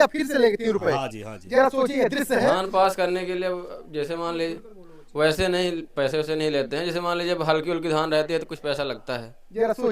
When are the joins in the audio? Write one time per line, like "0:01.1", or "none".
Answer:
0:02.6